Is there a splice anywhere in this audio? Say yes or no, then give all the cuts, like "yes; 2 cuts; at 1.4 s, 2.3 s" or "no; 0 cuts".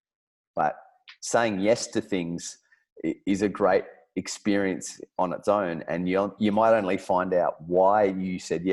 no; 0 cuts